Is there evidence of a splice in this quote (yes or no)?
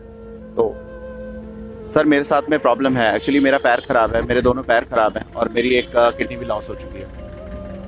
no